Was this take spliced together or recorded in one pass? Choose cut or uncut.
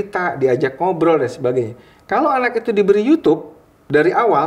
uncut